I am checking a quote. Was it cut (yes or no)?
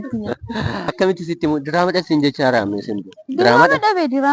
yes